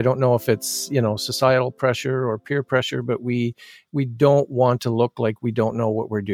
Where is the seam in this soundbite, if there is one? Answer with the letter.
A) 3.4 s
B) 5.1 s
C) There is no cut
C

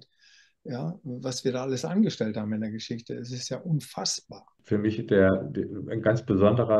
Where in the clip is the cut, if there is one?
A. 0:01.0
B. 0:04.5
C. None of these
B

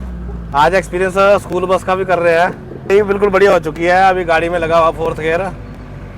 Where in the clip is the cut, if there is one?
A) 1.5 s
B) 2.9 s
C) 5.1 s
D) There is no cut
B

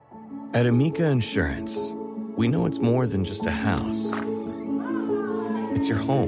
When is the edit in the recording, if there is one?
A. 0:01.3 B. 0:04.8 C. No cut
C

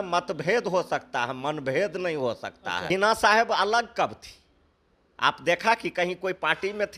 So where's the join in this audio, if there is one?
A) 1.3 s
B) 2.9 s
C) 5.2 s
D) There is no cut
B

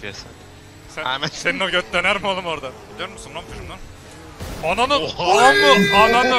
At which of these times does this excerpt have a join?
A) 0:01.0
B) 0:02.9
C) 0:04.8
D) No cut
B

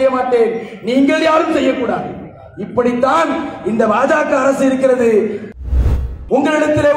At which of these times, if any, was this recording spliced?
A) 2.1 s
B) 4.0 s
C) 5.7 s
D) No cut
C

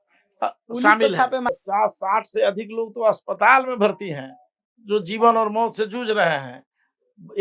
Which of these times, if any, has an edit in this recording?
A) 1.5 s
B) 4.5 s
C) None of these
A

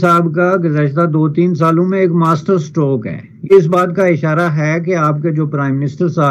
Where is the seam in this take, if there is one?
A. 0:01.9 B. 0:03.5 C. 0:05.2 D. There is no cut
B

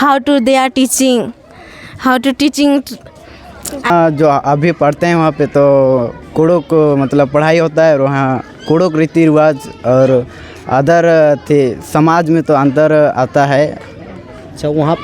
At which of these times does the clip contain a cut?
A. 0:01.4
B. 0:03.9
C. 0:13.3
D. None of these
B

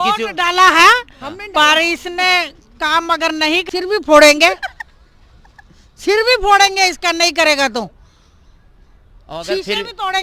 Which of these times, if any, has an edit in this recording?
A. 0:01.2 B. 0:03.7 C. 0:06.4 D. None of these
B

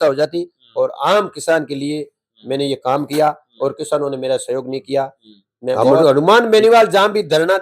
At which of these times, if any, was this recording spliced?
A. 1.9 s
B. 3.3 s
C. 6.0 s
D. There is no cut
C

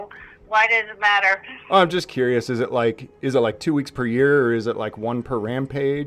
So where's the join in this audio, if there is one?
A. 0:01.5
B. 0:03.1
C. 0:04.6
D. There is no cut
D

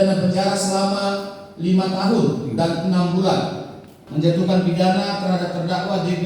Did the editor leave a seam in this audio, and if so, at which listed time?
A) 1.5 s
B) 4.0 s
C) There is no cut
B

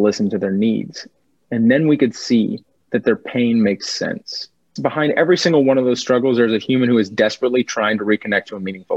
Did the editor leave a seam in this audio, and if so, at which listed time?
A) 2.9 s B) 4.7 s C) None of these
B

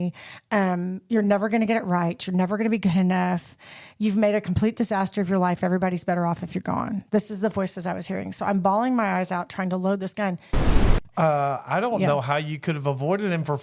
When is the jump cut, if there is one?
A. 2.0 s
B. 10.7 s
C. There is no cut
B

